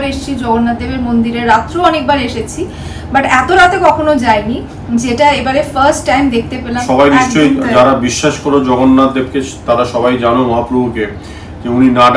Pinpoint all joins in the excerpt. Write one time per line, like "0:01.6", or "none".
0:06.8